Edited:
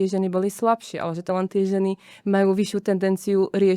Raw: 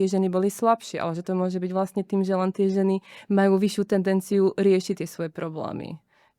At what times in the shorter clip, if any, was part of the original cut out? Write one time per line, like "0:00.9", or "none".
0:01.3